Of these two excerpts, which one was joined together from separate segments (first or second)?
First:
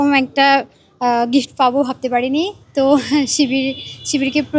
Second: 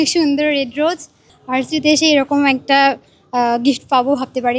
second